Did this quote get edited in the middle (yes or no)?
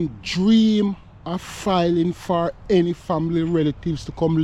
no